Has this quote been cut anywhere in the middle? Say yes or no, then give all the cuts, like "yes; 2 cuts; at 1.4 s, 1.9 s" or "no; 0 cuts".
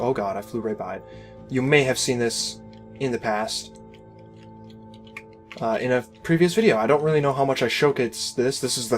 yes; 1 cut; at 3.3 s